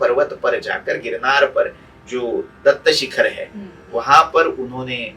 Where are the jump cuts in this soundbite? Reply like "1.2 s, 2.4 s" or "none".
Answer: none